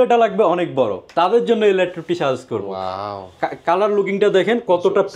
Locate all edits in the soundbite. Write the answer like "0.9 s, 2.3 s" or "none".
none

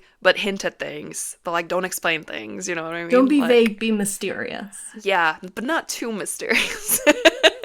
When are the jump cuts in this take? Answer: 4.8 s

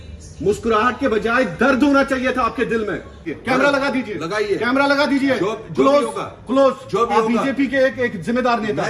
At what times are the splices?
3.3 s

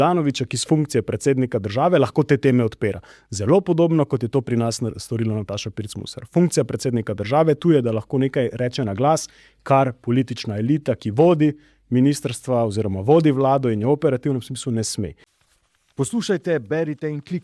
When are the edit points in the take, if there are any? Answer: 15.2 s

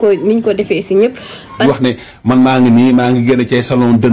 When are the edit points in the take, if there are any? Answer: 1.6 s

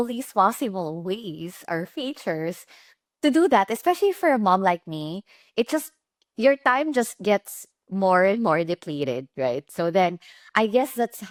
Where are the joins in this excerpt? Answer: none

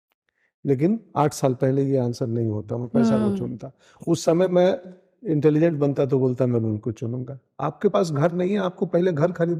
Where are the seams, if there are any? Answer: none

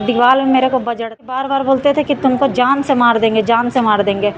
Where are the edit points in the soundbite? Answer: 1.4 s

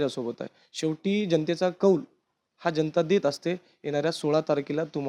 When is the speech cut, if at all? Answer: none

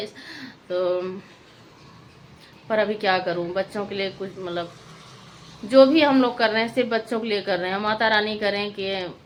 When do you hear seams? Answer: none

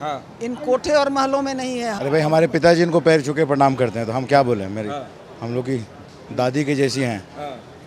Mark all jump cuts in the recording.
1.9 s

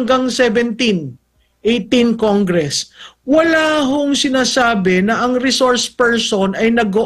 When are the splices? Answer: none

